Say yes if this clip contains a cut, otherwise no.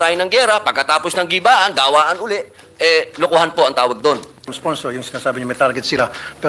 yes